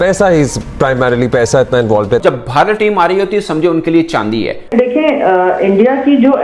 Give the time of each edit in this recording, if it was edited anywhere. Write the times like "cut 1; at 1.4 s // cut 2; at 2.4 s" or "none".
cut 1; at 2.2 s // cut 2; at 4.6 s

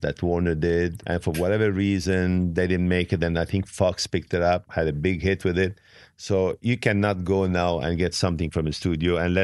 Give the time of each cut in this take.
cut 1; at 1.0 s // cut 2; at 4.6 s

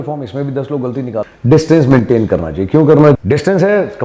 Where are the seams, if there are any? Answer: cut 1; at 1.3 s // cut 2; at 3.2 s

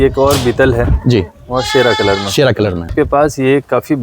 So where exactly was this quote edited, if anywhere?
cut 1; at 2.9 s

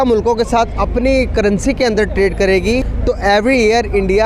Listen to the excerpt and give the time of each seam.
cut 1; at 2.9 s

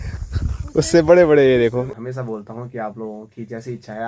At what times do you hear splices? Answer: cut 1; at 1.9 s

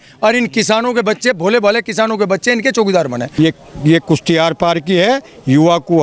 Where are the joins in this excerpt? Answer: cut 1; at 3.2 s

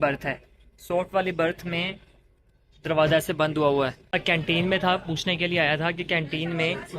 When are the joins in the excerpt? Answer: cut 1; at 4.1 s

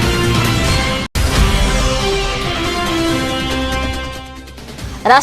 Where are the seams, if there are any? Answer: none

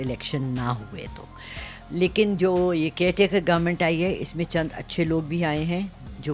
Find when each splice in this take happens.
none

